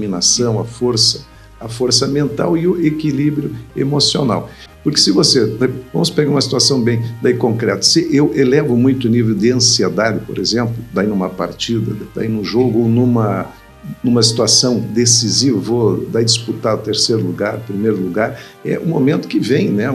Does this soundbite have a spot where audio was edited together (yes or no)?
no